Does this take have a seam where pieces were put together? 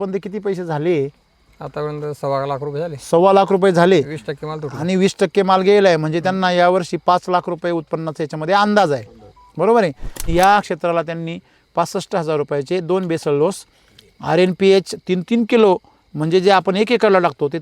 yes; 1 cut; at 10.1 s

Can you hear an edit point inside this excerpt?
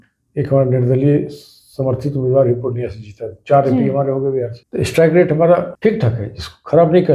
yes; 2 cuts; at 4.6 s, 5.7 s

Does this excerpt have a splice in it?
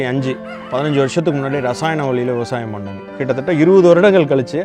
yes; 1 cut; at 3.1 s

